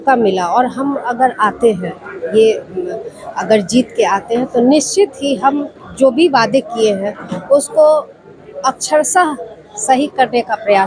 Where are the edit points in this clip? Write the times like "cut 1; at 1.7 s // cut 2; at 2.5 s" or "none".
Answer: none